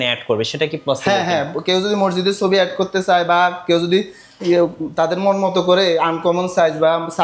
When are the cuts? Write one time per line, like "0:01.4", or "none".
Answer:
none